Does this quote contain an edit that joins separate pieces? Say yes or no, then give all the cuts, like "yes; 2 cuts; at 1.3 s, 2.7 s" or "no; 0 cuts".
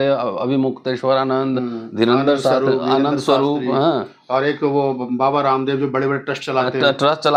no; 0 cuts